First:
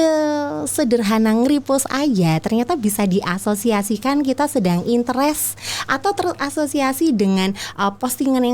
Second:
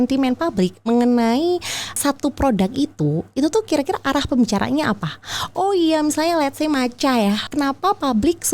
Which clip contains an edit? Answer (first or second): second